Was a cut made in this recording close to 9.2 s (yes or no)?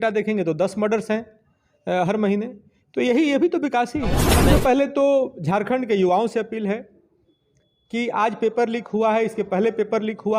no